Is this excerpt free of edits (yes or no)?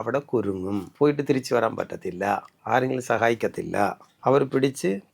no